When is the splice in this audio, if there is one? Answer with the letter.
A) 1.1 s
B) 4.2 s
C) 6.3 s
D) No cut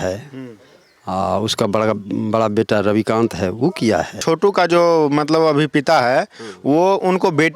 B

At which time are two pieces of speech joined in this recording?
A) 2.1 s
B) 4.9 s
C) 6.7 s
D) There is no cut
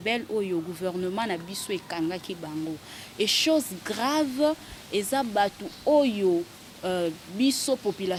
D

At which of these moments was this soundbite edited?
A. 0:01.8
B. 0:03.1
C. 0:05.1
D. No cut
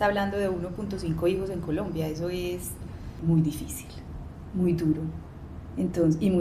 B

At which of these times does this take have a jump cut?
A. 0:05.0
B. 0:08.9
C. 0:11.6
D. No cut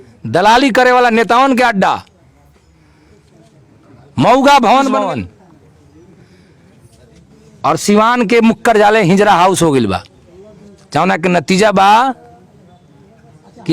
A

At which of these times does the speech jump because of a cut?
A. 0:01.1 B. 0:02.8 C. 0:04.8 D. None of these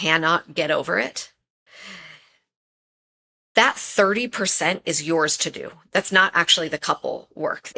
D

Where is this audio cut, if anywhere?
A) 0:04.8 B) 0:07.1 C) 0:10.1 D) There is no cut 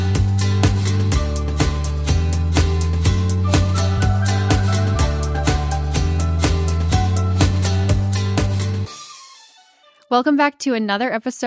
D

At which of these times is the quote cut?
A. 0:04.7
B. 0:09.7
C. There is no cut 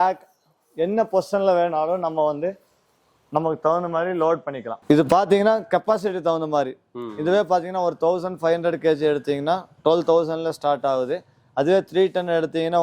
A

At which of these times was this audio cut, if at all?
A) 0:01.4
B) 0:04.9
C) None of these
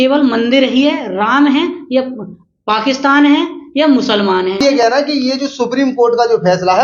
B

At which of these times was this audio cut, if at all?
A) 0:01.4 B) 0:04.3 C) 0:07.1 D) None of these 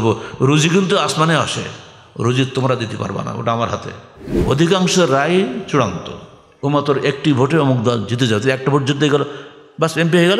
B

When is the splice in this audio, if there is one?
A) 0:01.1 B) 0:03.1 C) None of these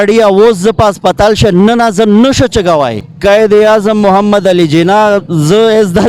B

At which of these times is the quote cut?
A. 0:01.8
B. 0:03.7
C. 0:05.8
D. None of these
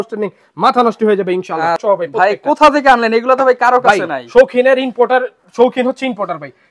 A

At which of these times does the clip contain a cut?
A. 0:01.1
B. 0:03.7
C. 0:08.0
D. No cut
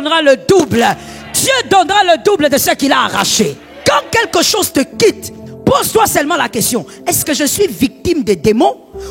B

